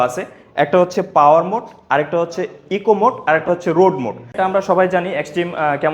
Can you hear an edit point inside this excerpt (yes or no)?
yes